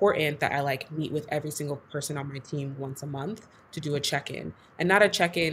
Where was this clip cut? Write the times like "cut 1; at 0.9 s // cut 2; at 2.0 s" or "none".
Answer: none